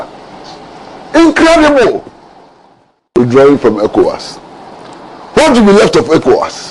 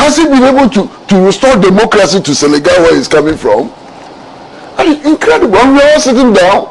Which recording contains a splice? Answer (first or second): first